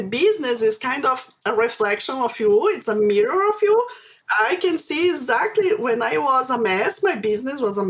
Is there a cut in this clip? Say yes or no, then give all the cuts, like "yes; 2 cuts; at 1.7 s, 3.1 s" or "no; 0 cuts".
yes; 1 cut; at 4.2 s